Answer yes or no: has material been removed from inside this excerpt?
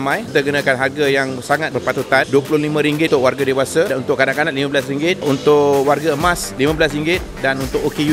no